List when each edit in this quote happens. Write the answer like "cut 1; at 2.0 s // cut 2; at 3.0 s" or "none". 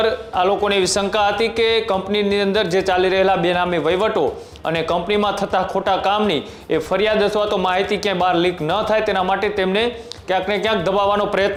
none